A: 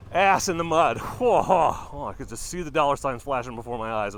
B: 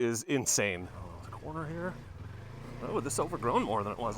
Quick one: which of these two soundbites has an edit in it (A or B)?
B